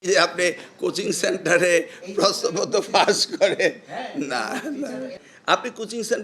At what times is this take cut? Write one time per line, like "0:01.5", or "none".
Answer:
0:05.3